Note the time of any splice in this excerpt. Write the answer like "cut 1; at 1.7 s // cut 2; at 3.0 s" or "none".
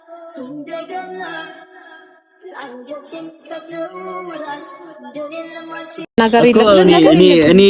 cut 1; at 6.0 s